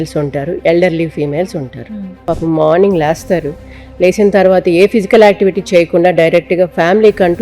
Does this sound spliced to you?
yes; 1 cut; at 2.2 s

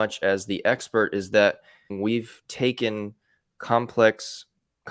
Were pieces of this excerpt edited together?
yes; 1 cut; at 1.9 s

